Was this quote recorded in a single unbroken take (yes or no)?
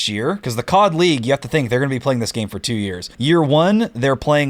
no